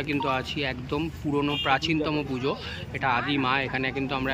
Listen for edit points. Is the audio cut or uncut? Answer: uncut